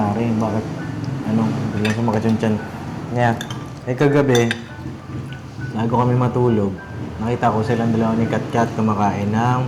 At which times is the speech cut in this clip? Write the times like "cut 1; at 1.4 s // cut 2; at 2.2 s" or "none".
none